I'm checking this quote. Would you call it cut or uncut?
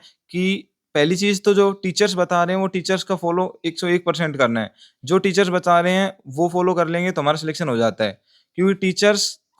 uncut